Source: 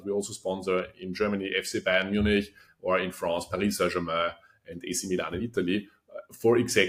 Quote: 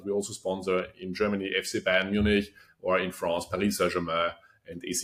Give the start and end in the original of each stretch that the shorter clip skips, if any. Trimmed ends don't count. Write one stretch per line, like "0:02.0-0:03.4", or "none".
none